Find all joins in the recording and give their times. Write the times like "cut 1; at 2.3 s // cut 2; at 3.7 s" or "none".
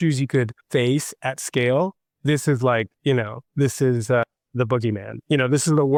none